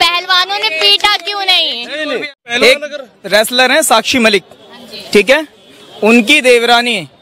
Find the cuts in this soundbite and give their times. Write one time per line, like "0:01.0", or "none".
0:02.4